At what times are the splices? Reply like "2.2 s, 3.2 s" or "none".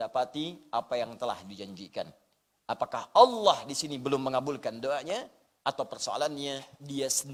none